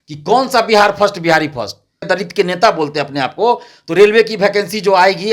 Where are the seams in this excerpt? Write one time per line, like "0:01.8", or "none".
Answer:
0:02.1